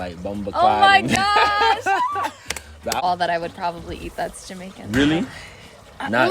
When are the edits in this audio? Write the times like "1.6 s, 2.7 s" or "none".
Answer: 3.0 s